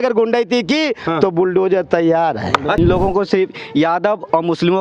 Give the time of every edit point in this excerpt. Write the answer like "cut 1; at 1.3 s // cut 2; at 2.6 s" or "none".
cut 1; at 2.8 s